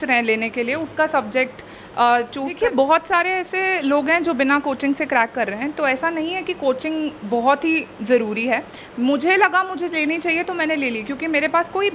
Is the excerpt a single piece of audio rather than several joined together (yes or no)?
no